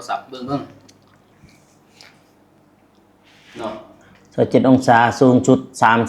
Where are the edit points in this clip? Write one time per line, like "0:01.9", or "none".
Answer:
0:01.3